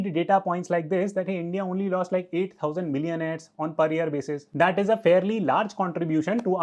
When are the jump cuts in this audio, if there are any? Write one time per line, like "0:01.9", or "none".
none